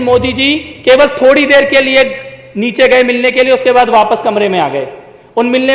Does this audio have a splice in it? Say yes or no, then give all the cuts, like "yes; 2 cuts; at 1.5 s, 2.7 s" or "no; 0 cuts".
no; 0 cuts